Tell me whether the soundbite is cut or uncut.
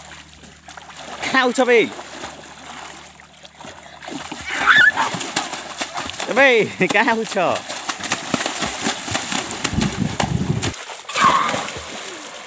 cut